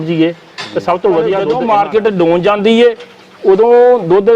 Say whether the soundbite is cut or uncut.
cut